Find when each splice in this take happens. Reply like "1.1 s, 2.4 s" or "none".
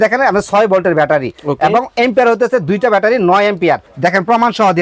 3.9 s